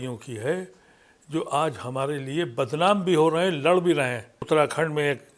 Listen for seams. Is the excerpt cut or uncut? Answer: cut